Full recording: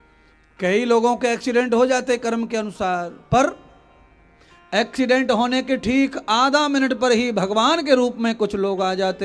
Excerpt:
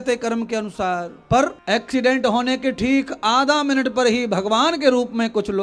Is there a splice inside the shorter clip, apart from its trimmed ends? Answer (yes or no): yes